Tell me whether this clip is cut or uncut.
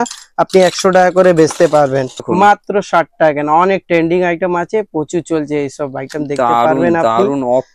cut